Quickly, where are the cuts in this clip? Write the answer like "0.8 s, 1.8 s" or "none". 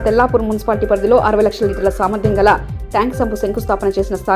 none